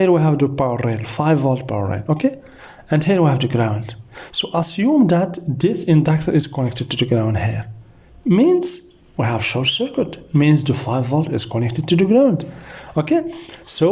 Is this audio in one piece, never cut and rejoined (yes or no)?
yes